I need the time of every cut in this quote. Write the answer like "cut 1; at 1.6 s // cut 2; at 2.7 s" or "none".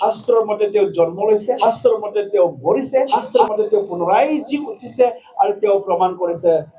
cut 1; at 1.6 s // cut 2; at 3.1 s